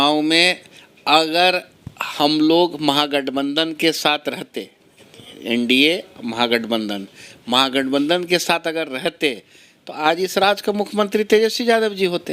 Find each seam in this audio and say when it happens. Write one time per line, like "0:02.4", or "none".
none